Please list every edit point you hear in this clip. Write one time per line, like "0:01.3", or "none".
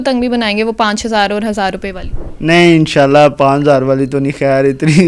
none